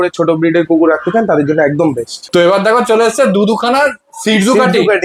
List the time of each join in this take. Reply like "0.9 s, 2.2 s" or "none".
none